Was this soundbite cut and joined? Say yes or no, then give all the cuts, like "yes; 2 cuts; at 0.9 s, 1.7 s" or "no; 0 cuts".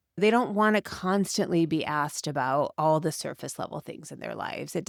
no; 0 cuts